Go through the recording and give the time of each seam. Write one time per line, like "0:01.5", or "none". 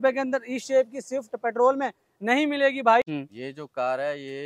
0:03.1